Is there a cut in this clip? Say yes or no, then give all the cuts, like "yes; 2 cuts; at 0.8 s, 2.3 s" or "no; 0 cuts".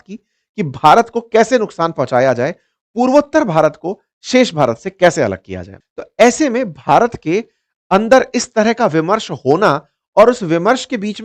yes; 1 cut; at 5.7 s